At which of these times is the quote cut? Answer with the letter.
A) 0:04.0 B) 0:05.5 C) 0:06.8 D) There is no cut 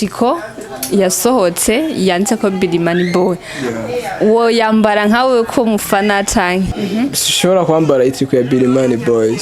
C